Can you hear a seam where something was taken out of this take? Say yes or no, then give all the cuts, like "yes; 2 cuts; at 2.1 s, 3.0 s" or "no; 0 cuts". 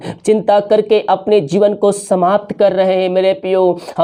no; 0 cuts